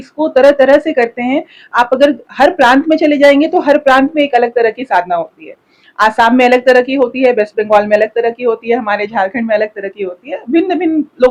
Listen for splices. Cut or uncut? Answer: uncut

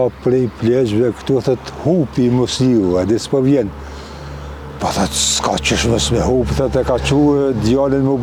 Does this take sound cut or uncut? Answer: uncut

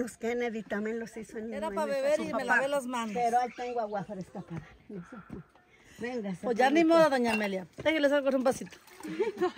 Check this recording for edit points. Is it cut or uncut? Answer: cut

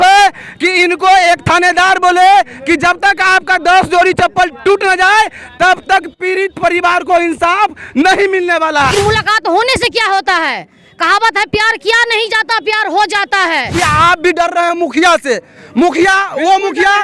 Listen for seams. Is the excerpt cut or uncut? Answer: cut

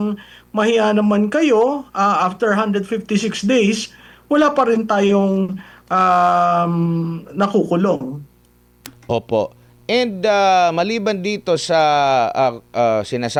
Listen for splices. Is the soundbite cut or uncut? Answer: uncut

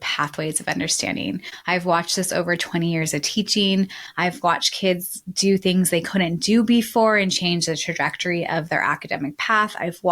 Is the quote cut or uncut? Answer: cut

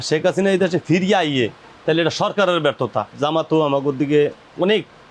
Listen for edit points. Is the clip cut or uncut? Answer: cut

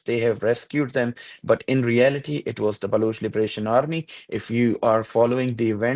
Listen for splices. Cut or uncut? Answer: uncut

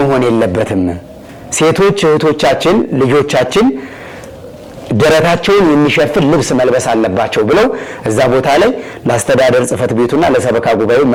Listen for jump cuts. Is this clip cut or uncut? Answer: uncut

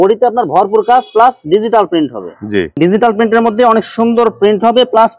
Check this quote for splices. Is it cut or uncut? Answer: cut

